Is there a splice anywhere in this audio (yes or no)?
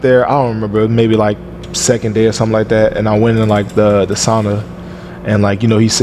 no